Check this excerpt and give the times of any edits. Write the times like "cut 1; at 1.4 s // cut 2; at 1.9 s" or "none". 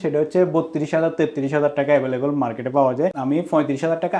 cut 1; at 3.2 s